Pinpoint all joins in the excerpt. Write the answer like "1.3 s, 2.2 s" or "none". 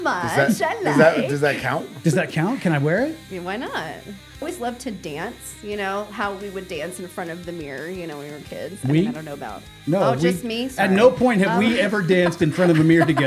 4.4 s